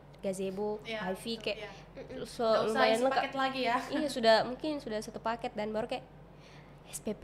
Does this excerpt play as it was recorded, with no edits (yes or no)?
yes